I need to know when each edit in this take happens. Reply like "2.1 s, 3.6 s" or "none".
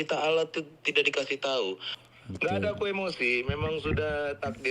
1.9 s